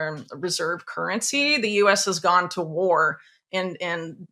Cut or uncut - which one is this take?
uncut